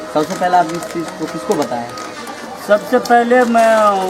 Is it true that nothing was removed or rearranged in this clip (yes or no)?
yes